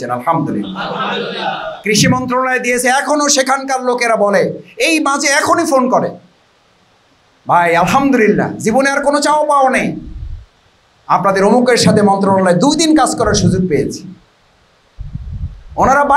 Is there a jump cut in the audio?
no; 0 cuts

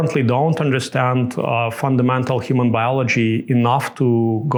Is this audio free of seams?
yes; 0 cuts

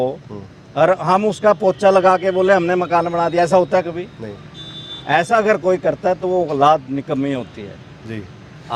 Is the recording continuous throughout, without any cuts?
yes; 0 cuts

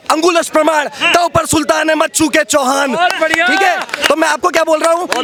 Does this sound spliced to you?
no; 0 cuts

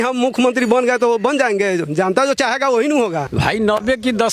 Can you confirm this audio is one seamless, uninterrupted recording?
no; 1 cut; at 3.3 s

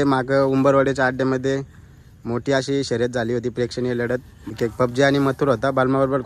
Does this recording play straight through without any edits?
no; 1 cut; at 4.5 s

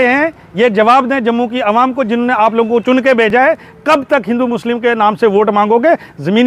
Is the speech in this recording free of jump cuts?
yes; 0 cuts

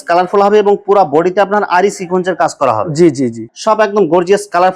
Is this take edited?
yes; 1 cut; at 3.4 s

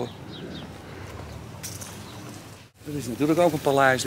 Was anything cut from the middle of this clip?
yes; 1 cut; at 2.7 s

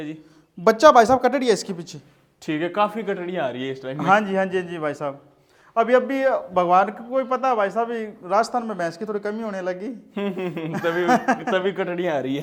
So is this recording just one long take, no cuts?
yes; 0 cuts

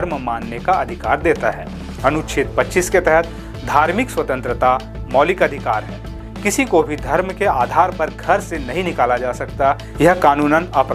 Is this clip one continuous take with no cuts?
yes; 0 cuts

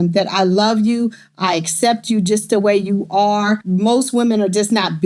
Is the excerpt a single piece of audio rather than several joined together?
no; 1 cut; at 3.6 s

